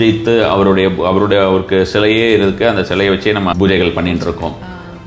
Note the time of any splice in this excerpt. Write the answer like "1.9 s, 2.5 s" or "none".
3.5 s